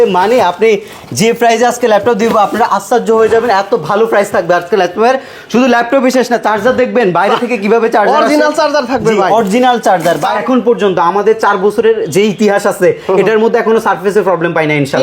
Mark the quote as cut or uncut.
cut